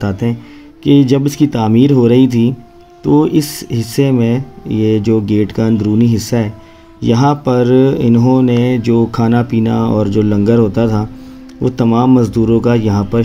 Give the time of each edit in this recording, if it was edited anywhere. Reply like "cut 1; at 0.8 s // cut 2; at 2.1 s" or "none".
none

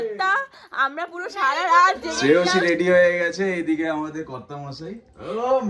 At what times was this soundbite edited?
cut 1; at 2.1 s

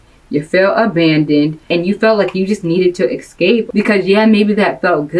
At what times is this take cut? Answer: cut 1; at 1.6 s // cut 2; at 3.7 s

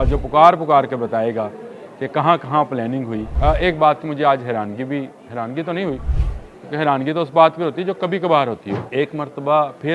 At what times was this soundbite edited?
cut 1; at 3.2 s // cut 2; at 8.8 s

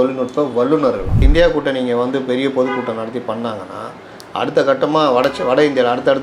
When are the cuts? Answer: cut 1; at 1.2 s

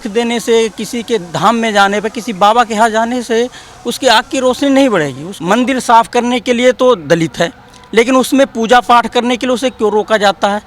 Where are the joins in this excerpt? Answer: cut 1; at 5.3 s

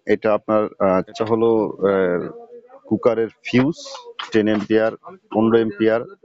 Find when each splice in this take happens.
cut 1; at 1.1 s

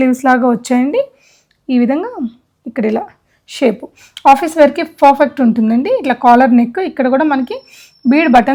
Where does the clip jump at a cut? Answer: none

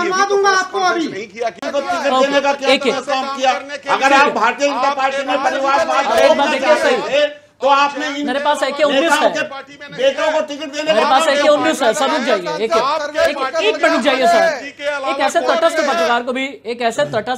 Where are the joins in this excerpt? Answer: cut 1; at 1.6 s

